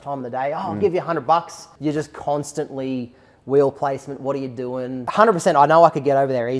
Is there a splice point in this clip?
yes; 2 cuts; at 1.7 s, 5.1 s

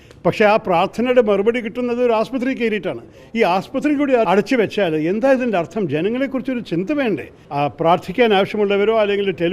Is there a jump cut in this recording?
yes; 2 cuts; at 4.3 s, 7.4 s

